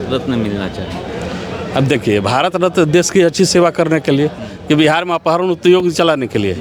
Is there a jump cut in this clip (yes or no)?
no